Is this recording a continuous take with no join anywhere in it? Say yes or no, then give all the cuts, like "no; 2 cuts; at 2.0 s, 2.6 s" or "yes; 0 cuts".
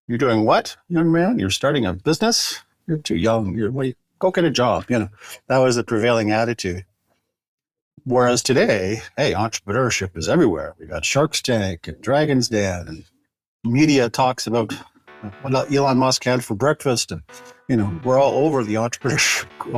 yes; 0 cuts